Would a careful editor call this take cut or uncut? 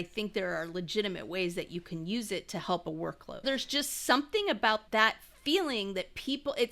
cut